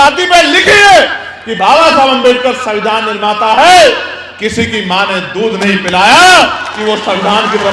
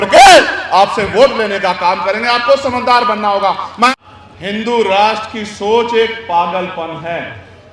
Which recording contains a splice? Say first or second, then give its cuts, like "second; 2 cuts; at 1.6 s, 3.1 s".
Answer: second; 1 cut; at 3.8 s